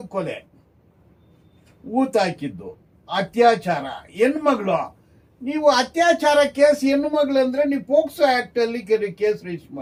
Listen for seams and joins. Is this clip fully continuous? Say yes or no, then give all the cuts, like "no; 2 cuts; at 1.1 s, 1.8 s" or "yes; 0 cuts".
yes; 0 cuts